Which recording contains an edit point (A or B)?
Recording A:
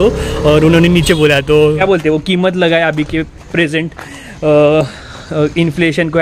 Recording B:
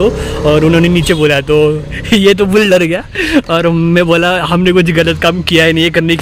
A